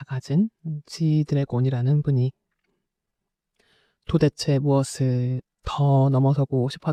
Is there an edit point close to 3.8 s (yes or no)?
no